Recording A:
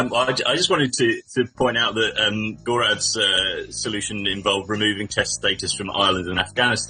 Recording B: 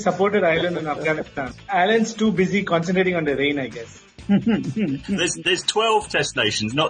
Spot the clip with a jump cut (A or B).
B